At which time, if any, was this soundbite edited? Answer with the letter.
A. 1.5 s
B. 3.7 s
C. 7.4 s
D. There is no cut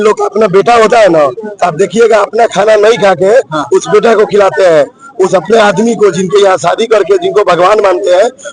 D